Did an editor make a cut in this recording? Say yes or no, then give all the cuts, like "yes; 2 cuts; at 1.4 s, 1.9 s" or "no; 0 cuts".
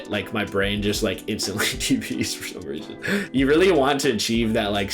yes; 1 cut; at 3.3 s